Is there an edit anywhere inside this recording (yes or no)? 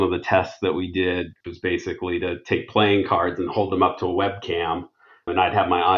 yes